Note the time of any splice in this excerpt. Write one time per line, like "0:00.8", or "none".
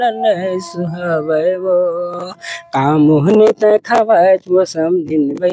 none